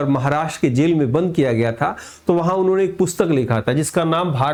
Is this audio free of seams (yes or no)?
yes